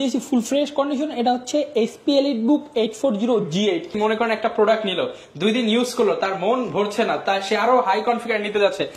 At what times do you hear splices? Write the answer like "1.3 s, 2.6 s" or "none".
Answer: 3.9 s